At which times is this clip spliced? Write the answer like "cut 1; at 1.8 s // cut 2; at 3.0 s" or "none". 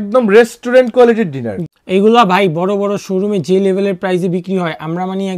cut 1; at 1.5 s